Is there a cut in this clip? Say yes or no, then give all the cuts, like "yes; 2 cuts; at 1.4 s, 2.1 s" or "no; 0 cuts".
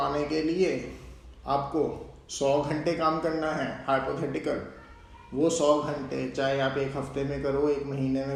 no; 0 cuts